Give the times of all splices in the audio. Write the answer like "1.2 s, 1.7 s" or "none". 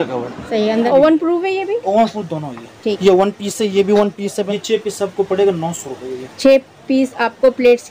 0.9 s, 4.5 s